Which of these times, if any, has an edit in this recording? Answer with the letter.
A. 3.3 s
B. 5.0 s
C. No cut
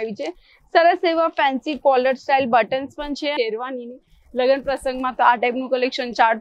A